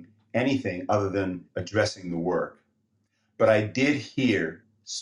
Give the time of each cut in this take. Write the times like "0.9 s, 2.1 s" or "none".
1.5 s